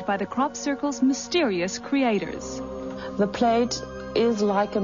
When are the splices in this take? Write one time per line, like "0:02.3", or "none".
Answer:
0:00.9